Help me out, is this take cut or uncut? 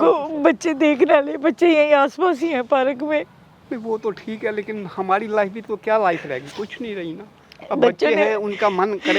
uncut